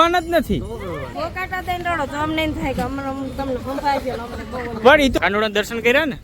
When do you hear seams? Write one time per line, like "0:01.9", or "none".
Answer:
0:01.1
0:05.1